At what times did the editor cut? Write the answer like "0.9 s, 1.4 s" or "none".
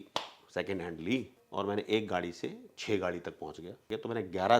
1.4 s, 3.8 s